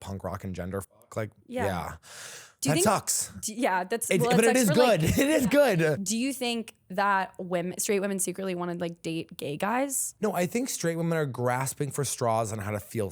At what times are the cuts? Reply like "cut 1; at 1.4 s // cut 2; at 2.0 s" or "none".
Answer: cut 1; at 6.0 s // cut 2; at 10.0 s